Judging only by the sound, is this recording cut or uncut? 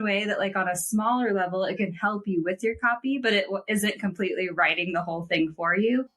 uncut